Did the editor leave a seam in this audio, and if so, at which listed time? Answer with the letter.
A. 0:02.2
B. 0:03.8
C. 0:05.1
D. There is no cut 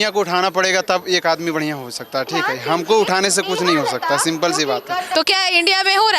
C